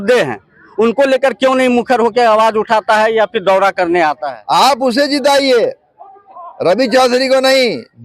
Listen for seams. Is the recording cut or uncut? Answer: cut